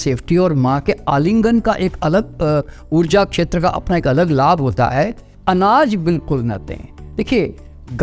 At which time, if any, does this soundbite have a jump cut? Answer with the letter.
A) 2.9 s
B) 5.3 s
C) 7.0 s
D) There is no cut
B